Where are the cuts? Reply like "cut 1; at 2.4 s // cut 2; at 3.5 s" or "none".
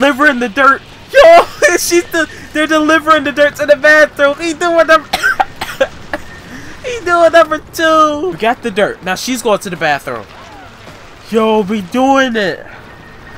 none